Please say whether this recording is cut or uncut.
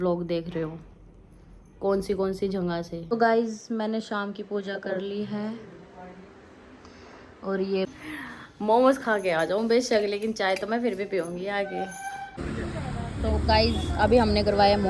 cut